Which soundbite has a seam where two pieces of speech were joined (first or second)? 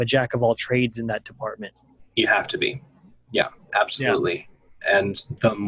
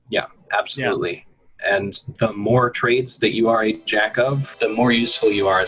second